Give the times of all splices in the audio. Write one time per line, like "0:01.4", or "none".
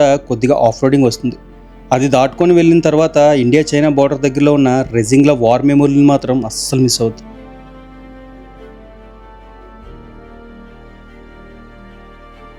none